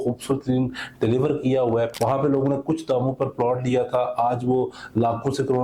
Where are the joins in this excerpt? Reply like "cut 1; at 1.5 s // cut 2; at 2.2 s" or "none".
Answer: cut 1; at 1.9 s